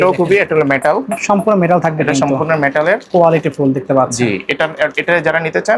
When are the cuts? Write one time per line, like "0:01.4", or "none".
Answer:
none